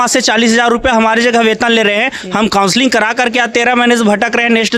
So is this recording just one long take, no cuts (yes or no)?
yes